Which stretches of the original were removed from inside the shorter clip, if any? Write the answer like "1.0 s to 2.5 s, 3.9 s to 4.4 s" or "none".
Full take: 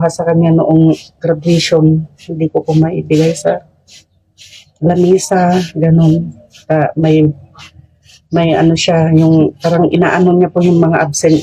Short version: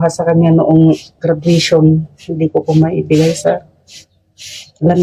none